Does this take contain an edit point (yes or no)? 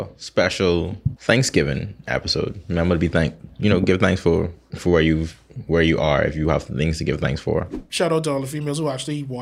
yes